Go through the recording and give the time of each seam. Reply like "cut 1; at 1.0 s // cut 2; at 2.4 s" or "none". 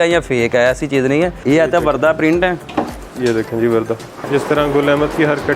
cut 1; at 1.4 s // cut 2; at 3.0 s // cut 3; at 4.3 s